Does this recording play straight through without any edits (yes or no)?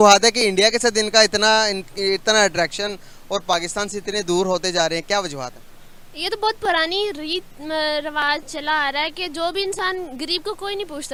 yes